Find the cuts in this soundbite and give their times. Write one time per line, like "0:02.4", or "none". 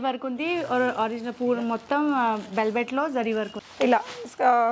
0:03.6